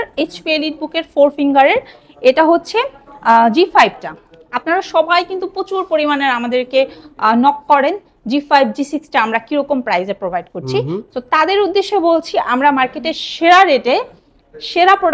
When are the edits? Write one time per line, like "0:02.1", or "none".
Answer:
none